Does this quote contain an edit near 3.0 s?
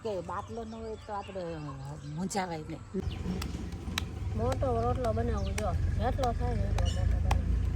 yes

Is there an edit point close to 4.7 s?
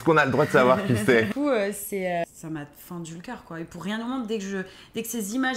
no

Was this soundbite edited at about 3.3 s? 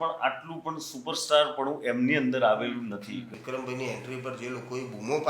yes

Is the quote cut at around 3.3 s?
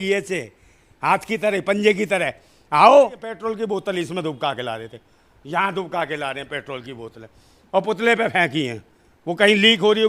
yes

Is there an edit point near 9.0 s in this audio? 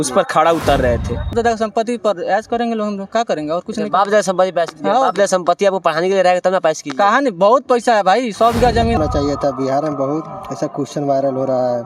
yes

